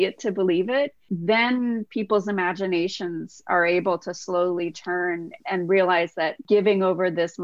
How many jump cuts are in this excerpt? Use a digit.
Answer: 3